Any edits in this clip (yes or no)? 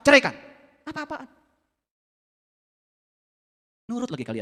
no